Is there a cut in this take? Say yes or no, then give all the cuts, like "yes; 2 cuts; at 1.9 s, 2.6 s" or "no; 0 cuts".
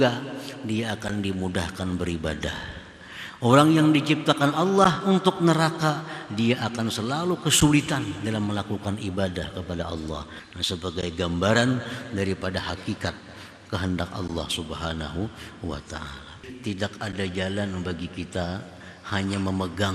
yes; 2 cuts; at 10.3 s, 16.5 s